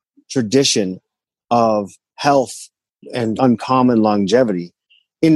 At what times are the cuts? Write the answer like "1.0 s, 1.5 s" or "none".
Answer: none